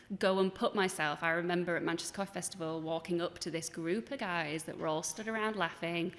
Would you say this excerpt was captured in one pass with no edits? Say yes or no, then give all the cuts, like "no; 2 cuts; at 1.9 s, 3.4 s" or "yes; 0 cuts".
yes; 0 cuts